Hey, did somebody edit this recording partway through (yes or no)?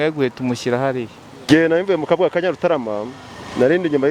yes